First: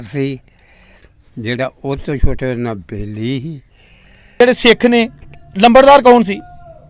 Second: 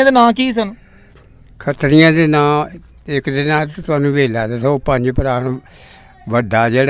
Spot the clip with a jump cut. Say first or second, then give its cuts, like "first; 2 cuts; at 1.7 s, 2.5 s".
first; 1 cut; at 4.4 s